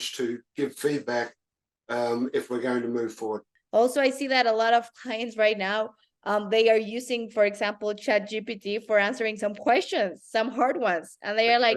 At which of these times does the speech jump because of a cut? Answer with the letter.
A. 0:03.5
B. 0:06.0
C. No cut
A